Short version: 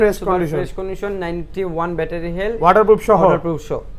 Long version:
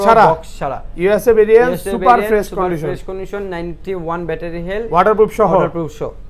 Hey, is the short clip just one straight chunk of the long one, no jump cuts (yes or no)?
yes